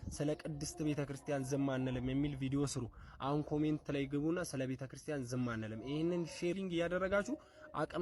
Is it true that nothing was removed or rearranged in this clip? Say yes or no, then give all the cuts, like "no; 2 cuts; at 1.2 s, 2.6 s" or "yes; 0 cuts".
no; 1 cut; at 6.6 s